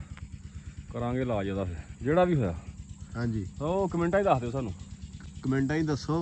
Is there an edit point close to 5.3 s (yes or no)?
no